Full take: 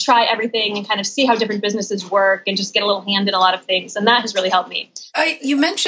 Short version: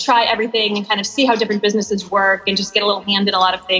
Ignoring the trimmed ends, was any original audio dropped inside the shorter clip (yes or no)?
no